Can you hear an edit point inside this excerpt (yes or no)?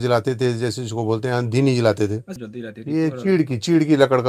yes